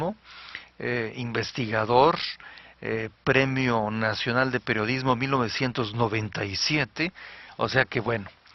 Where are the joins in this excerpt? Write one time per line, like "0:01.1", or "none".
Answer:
0:07.6